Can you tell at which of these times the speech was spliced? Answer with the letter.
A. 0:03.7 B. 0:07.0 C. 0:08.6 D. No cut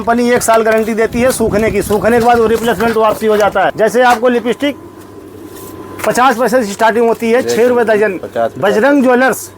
A